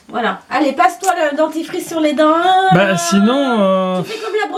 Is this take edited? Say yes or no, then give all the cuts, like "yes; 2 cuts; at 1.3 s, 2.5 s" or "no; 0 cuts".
no; 0 cuts